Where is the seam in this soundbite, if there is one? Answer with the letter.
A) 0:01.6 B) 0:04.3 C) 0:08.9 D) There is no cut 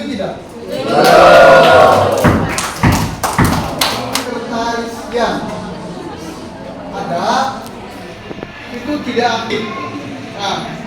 B